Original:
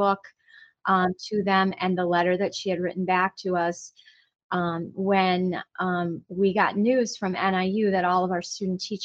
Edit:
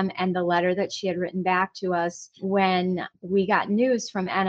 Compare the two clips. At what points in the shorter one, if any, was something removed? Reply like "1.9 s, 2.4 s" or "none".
2.3 s, 3.1 s